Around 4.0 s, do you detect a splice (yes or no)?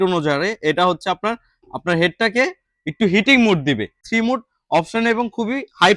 yes